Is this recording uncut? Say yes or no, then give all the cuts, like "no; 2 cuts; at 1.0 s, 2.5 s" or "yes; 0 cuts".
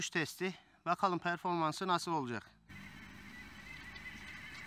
no; 1 cut; at 2.7 s